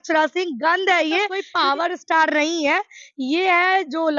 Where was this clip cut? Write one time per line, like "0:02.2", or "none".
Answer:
0:01.4